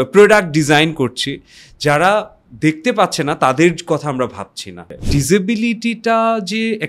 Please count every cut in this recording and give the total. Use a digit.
1